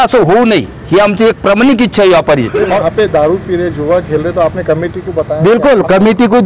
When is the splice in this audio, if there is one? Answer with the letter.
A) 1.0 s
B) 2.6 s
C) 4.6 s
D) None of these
B